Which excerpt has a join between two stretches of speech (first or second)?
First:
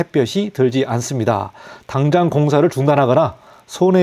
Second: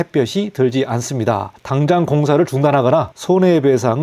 second